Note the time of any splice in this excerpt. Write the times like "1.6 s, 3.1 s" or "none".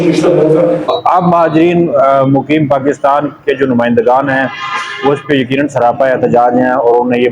0.9 s